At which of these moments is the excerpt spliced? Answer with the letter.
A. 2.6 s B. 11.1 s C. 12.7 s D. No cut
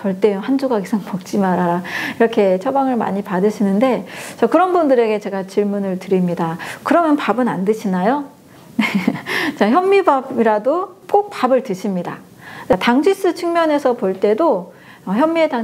C